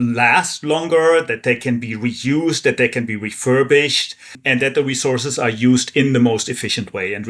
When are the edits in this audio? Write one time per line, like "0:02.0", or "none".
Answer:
0:04.4